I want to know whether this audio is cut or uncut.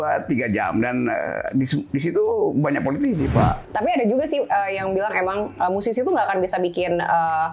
cut